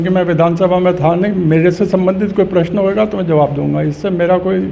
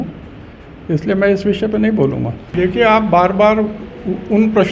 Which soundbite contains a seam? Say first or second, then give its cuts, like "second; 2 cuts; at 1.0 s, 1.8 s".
second; 1 cut; at 2.4 s